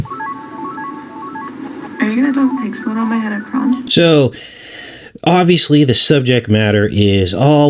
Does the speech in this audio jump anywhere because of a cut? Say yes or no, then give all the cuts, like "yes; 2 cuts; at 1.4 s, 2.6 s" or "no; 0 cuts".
no; 0 cuts